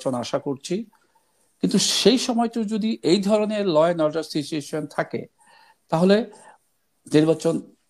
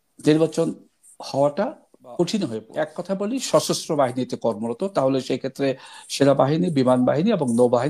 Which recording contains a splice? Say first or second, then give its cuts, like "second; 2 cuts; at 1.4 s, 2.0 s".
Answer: second; 1 cut; at 2.6 s